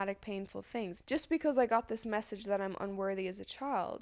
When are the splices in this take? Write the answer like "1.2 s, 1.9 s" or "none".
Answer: 0.9 s